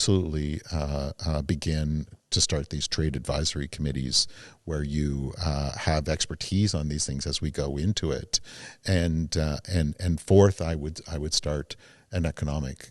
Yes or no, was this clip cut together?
no